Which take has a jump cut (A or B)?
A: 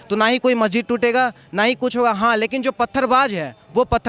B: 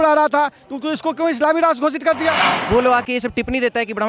B